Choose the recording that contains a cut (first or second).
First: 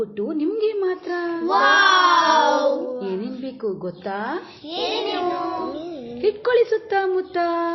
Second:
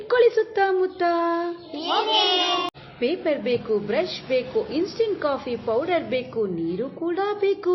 second